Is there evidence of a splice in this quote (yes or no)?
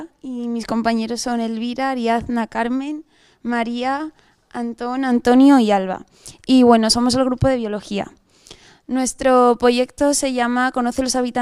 no